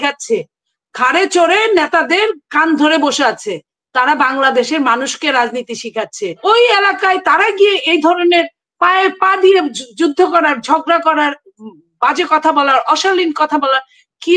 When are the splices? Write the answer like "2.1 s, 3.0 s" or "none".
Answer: 6.4 s